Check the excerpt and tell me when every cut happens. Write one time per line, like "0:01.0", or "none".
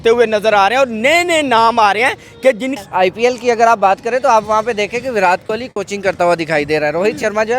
0:02.7